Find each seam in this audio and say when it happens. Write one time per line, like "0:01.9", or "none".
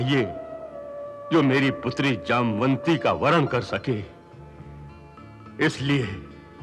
none